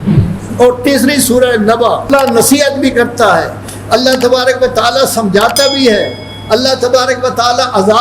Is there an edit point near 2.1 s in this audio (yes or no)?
yes